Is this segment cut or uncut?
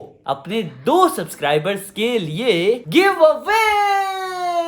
uncut